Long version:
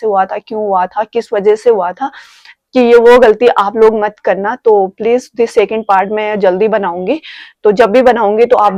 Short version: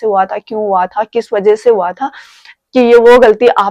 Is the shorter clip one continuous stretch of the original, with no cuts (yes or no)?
yes